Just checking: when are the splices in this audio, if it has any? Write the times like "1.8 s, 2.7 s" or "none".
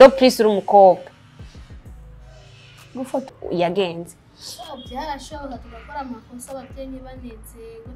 3.4 s